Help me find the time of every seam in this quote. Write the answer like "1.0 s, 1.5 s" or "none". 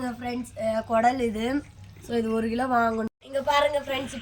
3.2 s